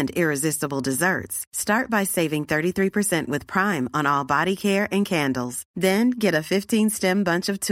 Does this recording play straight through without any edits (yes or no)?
yes